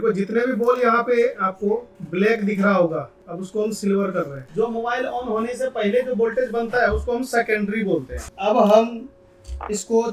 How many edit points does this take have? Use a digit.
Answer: 2